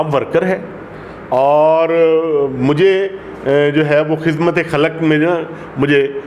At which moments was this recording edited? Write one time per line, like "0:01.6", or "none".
none